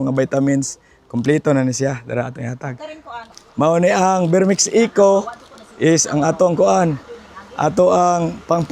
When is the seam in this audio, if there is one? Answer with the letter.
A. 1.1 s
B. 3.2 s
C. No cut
B